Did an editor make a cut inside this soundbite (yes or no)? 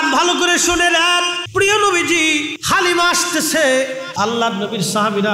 yes